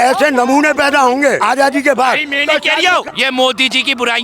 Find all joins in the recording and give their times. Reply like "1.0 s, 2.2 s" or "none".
1.4 s, 3.1 s